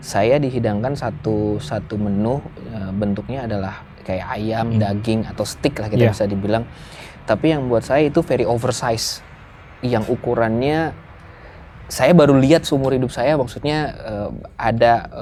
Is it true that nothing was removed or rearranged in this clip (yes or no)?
yes